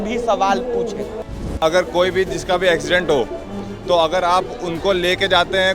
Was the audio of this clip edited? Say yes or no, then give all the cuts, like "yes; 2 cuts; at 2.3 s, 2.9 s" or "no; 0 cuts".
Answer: yes; 1 cut; at 1.5 s